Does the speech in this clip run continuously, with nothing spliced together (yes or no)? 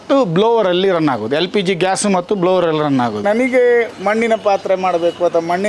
no